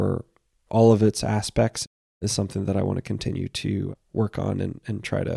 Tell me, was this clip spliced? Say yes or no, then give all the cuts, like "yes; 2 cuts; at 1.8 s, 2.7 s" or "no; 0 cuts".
yes; 2 cuts; at 1.8 s, 3.9 s